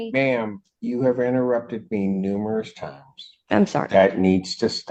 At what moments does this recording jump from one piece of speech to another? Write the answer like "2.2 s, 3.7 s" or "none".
none